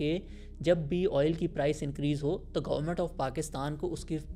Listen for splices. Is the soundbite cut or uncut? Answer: uncut